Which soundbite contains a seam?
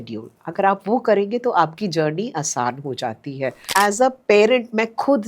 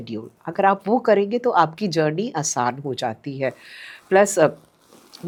first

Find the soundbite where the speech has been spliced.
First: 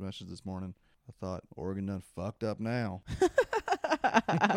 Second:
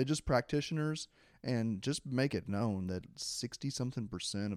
first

